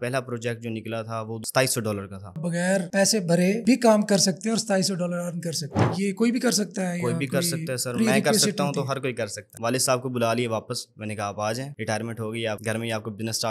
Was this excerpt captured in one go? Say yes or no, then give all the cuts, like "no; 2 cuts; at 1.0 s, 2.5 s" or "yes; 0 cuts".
no; 5 cuts; at 1.4 s, 2.4 s, 5.9 s, 9.5 s, 12.6 s